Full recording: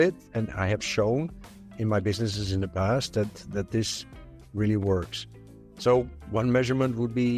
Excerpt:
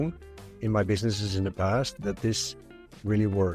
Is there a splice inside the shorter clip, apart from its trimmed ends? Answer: yes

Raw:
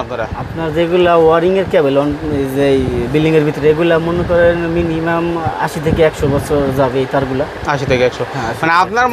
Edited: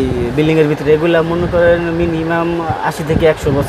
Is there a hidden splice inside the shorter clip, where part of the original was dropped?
no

